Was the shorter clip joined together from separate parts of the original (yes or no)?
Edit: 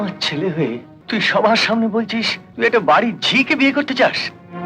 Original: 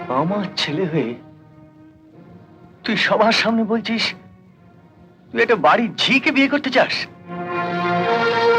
yes